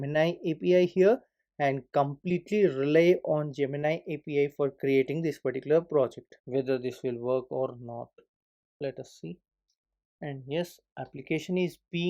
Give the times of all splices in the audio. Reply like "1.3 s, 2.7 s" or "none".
6.4 s

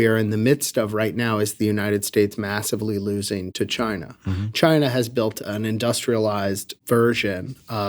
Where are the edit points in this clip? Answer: 3.5 s, 5.4 s, 6.7 s

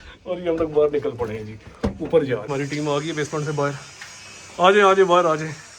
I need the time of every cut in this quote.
2.5 s

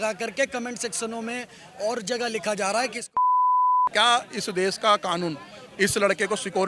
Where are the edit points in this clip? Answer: 3.9 s

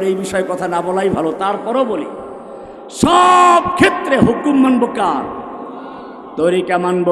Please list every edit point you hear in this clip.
none

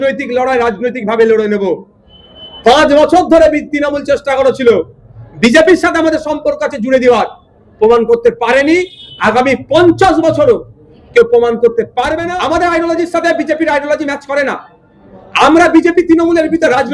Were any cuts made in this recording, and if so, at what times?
12.3 s

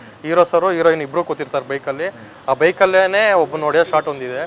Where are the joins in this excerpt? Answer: none

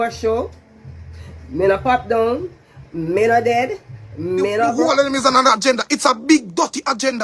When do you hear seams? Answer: 4.7 s

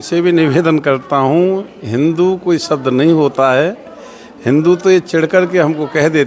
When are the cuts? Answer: none

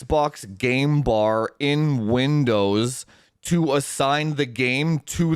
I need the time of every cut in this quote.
none

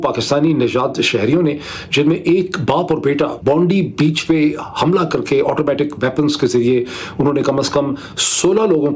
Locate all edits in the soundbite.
3.4 s

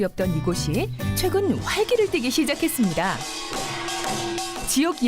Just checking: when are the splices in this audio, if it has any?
1.6 s

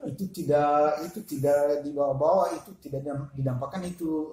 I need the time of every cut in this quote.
none

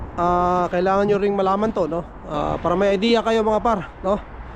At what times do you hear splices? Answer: 2.2 s

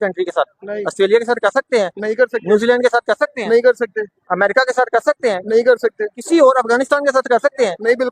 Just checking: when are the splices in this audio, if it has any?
none

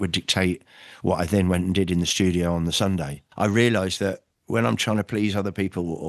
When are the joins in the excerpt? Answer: 3.2 s

